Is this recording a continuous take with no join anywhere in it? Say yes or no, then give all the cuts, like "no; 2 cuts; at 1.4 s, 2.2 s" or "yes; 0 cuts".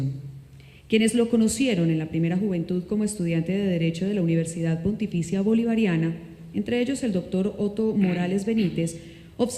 no; 1 cut; at 8.2 s